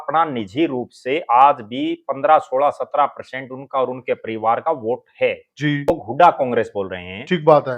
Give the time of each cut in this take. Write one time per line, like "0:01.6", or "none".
0:05.9

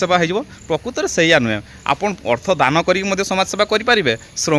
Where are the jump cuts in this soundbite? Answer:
none

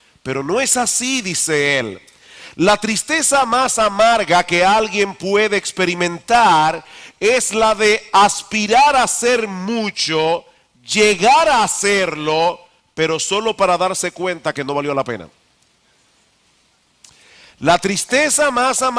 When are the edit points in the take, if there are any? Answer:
0:01.9

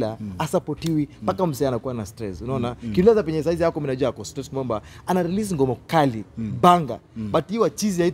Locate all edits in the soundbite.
none

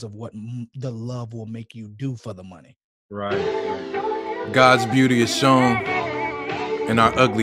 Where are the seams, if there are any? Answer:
0:03.4

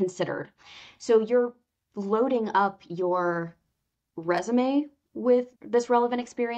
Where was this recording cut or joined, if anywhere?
0:05.5

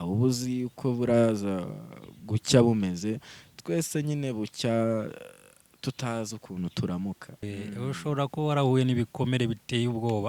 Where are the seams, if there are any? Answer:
0:07.5

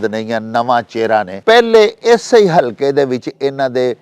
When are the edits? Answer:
0:01.3

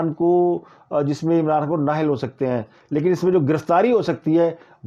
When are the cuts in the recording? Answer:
none

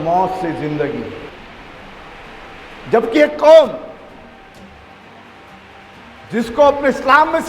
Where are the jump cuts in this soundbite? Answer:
0:01.3

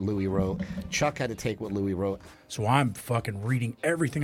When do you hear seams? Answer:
0:02.2

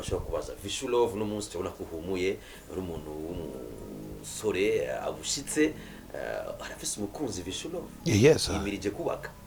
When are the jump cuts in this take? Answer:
none

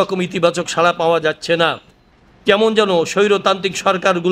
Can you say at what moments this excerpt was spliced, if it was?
none

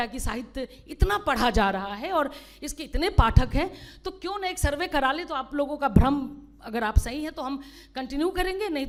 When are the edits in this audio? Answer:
none

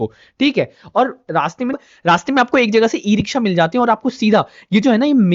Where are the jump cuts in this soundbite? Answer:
0:01.7

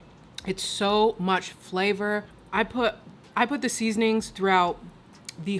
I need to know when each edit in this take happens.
0:02.4

